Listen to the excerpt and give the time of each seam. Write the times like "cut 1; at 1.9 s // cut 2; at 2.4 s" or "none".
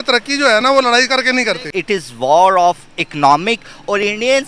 cut 1; at 1.7 s